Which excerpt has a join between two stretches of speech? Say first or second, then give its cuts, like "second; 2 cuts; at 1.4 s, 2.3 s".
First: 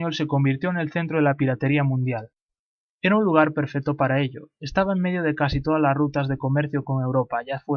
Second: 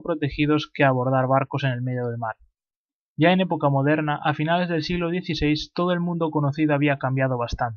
second; 1 cut; at 4.5 s